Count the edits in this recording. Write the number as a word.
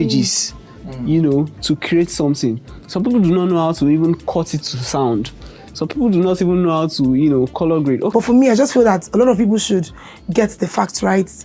one